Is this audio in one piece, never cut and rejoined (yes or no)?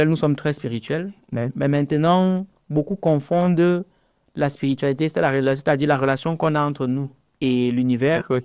yes